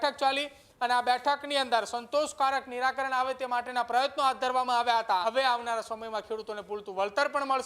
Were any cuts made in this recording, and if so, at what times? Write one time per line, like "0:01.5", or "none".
0:05.2